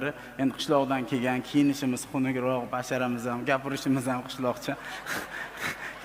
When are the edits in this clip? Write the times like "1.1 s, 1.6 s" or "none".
none